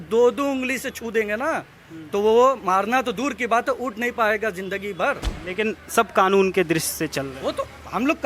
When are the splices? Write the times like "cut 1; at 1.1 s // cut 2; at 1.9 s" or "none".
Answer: cut 1; at 5.3 s